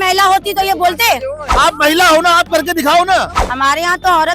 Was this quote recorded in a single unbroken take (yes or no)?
no